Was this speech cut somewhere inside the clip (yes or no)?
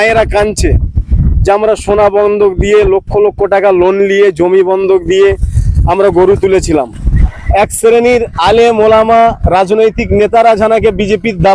yes